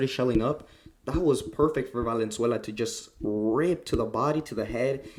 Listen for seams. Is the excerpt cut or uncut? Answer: uncut